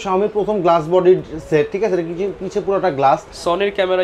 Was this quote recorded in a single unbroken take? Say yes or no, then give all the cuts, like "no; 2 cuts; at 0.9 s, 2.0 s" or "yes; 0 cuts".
yes; 0 cuts